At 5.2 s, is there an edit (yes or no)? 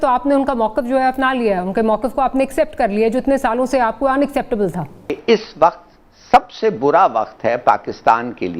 yes